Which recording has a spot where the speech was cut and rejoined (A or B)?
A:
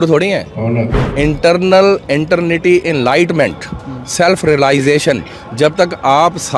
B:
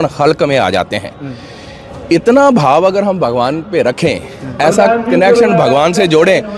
A